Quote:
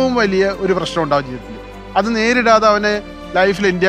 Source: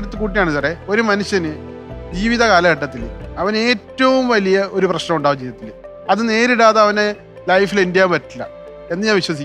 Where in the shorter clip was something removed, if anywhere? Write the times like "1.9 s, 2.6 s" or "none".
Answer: none